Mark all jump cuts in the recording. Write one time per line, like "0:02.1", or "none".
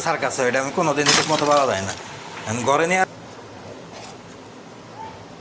0:03.0